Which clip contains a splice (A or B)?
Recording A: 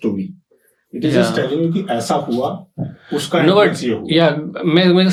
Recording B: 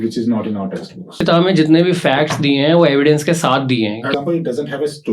B